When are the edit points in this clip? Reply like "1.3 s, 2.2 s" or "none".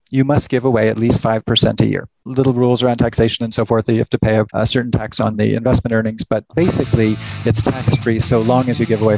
none